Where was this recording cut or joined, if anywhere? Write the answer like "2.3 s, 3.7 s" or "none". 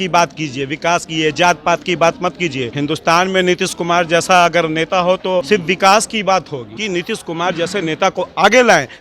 2.7 s, 5.5 s, 6.7 s